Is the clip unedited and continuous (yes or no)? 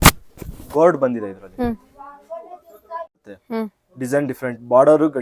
no